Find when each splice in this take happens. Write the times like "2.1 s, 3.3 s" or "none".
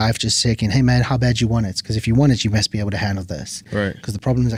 none